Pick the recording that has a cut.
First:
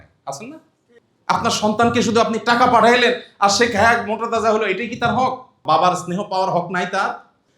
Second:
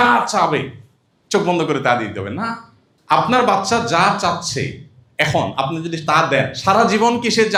first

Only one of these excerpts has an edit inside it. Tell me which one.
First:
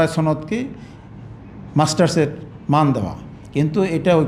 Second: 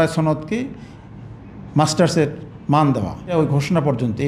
second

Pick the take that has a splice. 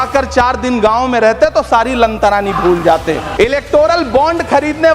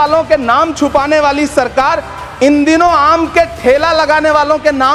first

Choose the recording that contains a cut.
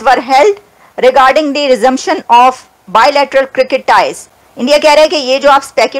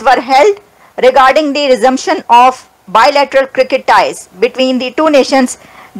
first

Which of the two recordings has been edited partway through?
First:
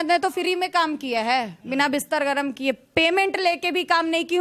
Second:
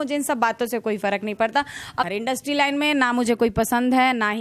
second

